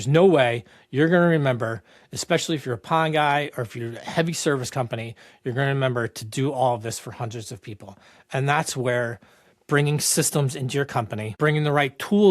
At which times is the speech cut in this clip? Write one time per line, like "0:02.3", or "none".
0:11.3